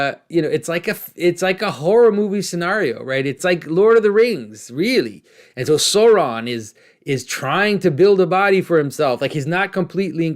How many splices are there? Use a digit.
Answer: 1